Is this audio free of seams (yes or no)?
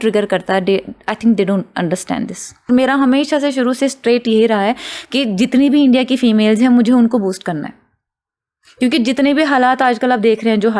no